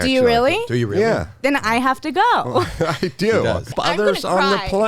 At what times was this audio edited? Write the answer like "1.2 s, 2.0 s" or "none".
3.7 s